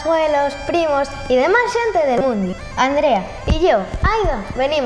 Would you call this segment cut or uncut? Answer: cut